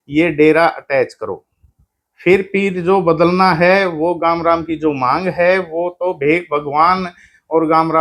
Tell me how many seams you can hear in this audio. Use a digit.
0